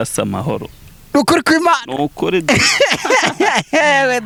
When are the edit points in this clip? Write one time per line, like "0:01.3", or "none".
none